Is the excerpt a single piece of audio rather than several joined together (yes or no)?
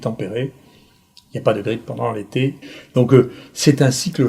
no